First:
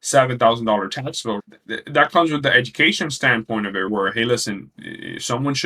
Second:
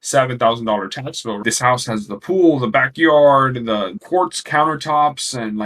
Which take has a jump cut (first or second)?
second